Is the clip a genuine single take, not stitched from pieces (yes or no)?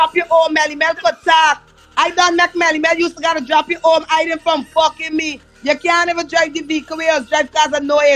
yes